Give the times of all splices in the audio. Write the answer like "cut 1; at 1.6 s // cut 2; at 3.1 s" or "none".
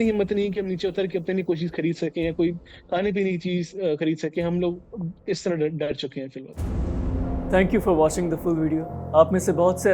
none

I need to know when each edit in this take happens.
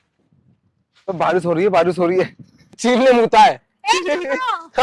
cut 1; at 2.8 s

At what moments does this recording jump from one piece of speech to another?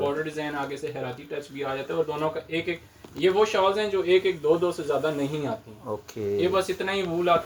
none

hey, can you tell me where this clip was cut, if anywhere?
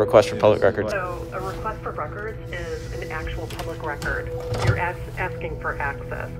cut 1; at 0.9 s

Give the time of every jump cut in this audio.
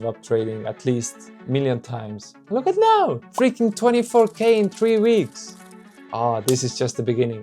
cut 1; at 2.4 s

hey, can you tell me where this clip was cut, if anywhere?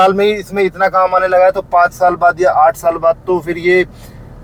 none

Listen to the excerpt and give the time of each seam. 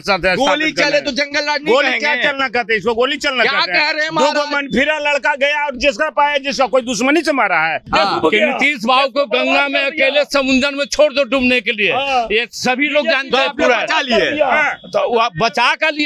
cut 1; at 7.8 s

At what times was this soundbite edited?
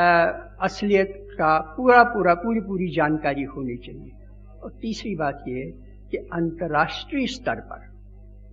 cut 1; at 7.5 s

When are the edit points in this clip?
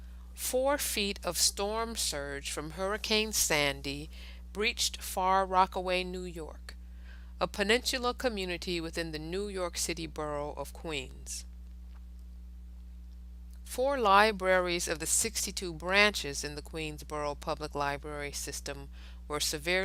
none

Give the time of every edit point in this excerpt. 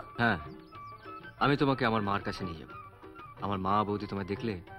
none

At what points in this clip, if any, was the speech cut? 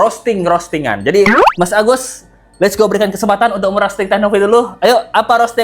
none

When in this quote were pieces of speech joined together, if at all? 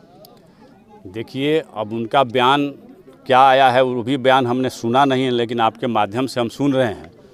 none

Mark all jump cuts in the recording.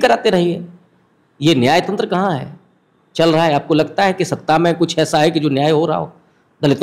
none

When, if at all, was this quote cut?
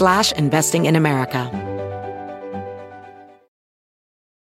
cut 1; at 1.5 s

